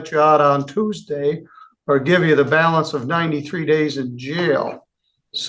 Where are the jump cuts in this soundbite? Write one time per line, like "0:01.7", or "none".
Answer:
none